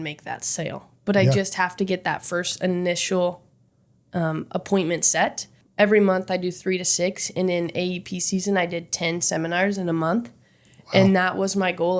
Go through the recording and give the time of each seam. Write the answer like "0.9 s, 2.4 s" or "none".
5.6 s